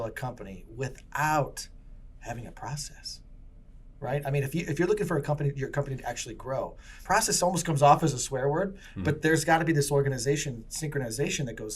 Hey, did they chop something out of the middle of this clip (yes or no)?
yes